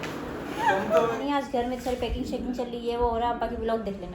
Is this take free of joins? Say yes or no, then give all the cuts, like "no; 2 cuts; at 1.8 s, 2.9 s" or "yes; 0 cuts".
no; 1 cut; at 1.2 s